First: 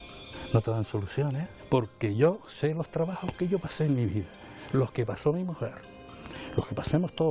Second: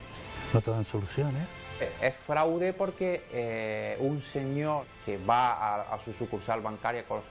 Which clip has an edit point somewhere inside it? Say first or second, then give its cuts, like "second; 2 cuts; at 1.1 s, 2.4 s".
second; 2 cuts; at 1.6 s, 4.9 s